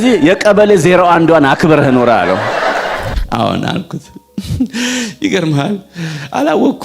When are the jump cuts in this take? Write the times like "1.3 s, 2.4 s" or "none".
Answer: 3.1 s